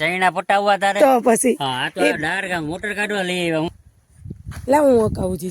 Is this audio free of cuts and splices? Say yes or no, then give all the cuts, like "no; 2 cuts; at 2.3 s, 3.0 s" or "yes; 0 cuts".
no; 1 cut; at 3.7 s